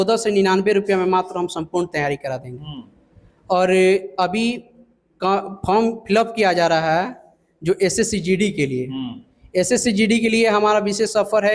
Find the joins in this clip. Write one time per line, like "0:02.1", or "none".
none